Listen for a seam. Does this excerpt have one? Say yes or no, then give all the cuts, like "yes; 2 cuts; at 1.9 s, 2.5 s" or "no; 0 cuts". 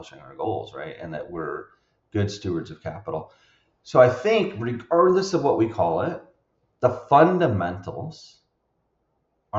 no; 0 cuts